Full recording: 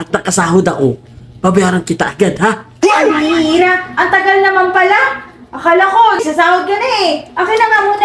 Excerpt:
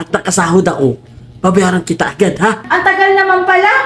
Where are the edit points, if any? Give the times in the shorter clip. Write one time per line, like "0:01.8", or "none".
0:02.6